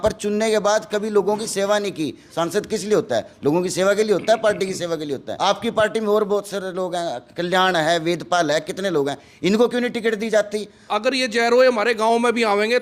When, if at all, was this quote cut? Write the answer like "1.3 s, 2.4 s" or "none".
2.2 s, 5.2 s, 10.9 s